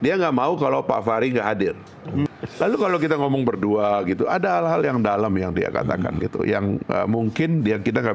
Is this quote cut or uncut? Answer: cut